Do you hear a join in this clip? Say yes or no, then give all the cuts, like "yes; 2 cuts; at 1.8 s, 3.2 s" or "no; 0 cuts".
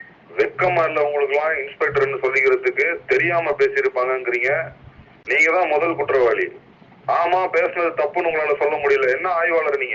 no; 0 cuts